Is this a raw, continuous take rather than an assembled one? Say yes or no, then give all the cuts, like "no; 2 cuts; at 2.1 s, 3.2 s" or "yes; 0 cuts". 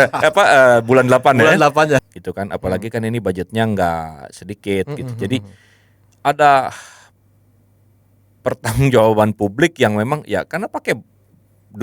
no; 1 cut; at 2.1 s